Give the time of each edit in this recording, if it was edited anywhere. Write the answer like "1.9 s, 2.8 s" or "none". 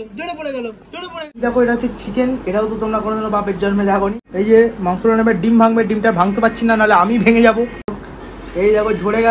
1.2 s, 4.2 s, 8.0 s